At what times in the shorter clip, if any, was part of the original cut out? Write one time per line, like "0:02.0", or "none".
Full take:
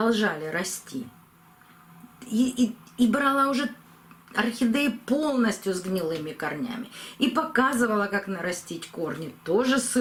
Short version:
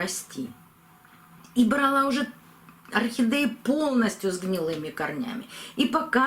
0:01.4